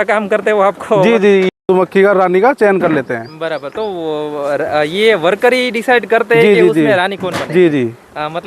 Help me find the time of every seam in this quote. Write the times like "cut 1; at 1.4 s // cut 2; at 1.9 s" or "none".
cut 1; at 1.5 s